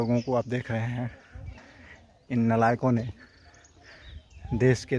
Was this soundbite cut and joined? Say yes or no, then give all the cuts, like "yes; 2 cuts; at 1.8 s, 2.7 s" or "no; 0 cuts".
no; 0 cuts